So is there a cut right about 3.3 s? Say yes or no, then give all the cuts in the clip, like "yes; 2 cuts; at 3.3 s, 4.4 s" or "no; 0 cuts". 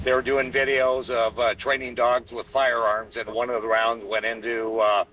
yes; 1 cut; at 3.3 s